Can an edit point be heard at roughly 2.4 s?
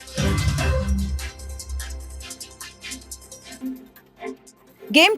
no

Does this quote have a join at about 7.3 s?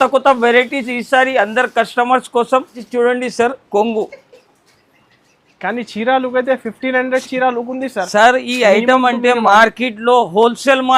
no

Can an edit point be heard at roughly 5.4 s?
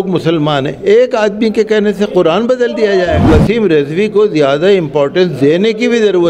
no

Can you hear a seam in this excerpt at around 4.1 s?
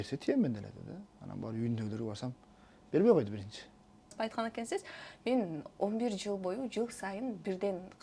yes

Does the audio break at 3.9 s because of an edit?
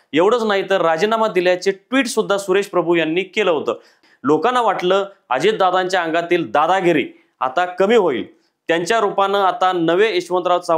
yes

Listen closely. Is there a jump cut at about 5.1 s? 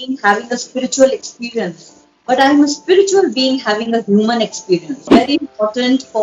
yes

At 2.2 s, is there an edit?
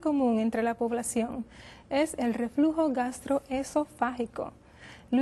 yes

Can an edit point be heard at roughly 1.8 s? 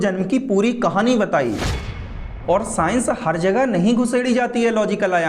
yes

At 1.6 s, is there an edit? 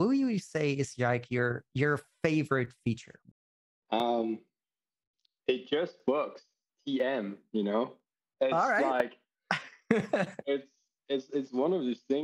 no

